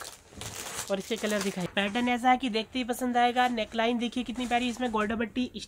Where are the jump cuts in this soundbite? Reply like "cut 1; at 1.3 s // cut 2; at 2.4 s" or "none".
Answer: cut 1; at 1.7 s